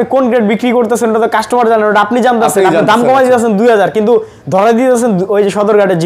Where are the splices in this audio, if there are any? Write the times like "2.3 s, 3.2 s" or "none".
none